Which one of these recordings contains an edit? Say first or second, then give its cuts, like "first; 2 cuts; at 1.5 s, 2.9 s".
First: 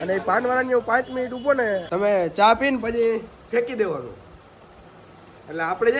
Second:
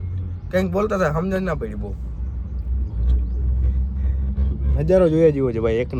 first; 1 cut; at 1.9 s